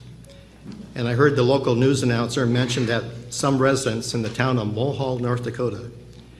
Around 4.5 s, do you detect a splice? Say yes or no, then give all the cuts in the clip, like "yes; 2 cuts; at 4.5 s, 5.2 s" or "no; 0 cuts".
yes; 1 cut; at 4.5 s